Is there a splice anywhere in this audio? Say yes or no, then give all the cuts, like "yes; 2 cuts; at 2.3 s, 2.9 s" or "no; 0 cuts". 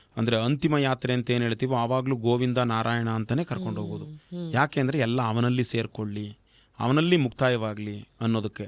no; 0 cuts